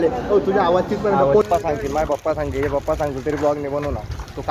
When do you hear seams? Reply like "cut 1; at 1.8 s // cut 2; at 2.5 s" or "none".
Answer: cut 1; at 1.5 s